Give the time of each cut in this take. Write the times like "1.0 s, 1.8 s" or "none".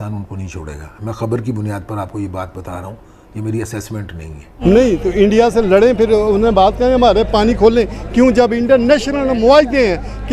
4.5 s